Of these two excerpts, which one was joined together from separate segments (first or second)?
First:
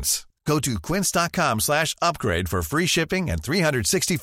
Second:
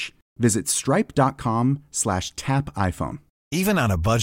second